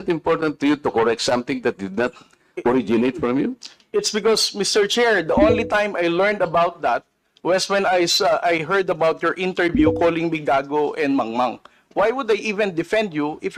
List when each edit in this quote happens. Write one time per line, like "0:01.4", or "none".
none